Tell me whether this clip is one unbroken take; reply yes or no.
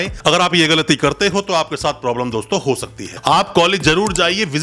no